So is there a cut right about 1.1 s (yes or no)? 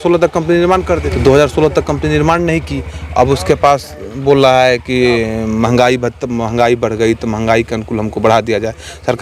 yes